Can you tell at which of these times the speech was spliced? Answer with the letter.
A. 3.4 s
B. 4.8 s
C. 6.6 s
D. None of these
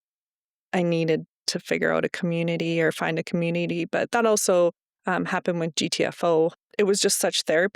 C